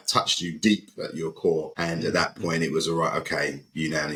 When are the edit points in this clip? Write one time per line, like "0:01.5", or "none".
none